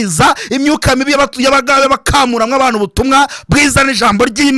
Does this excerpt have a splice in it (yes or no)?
no